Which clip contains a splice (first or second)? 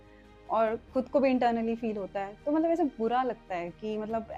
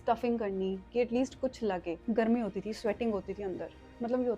second